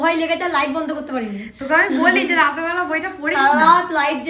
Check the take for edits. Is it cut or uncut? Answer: uncut